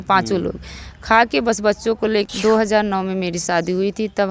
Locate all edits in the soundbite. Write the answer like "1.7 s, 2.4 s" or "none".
2.3 s